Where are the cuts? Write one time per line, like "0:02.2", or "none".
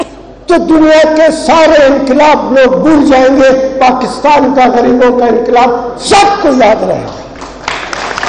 none